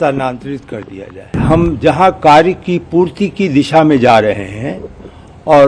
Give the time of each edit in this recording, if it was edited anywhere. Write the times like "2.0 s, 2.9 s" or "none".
1.4 s